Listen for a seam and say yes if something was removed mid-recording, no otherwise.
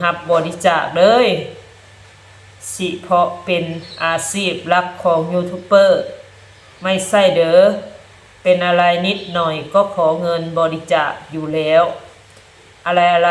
no